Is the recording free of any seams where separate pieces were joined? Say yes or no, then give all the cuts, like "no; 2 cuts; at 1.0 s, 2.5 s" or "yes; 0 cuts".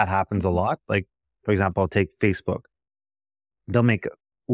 yes; 0 cuts